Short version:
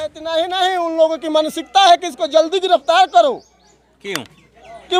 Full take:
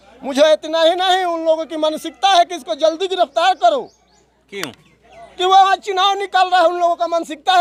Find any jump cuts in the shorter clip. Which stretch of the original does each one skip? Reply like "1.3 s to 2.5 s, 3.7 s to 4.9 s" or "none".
none

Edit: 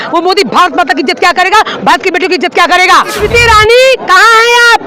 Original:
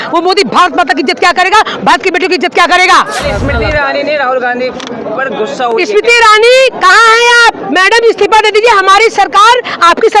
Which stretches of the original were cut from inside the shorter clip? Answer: 3.1 s to 5.9 s

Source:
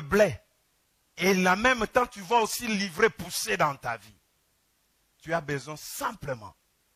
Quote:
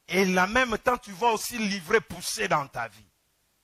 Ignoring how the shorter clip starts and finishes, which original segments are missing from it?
none

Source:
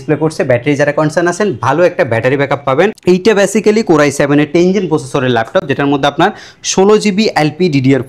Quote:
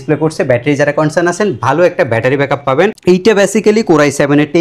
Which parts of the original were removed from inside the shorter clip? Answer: none

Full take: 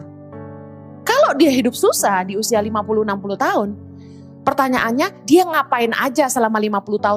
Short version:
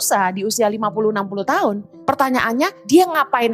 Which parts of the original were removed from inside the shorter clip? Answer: 3.8 s to 4.3 s

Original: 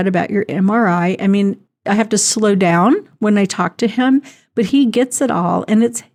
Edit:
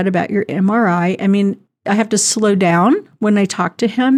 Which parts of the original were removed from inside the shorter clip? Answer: none

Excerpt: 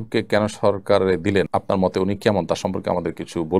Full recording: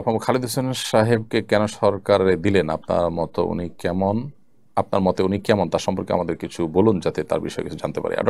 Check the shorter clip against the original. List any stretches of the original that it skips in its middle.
2.7 s to 4.7 s

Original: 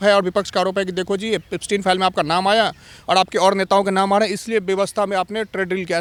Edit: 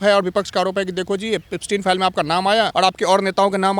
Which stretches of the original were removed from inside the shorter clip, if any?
2.7 s to 3.0 s

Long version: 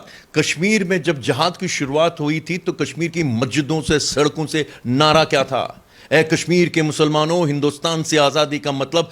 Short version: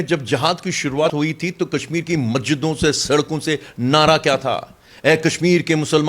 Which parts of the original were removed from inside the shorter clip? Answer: 2.0 s to 2.1 s

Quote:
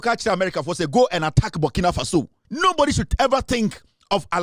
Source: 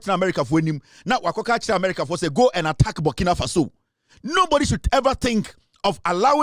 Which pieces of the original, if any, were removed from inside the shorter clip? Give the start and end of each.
3.8 s to 4.1 s

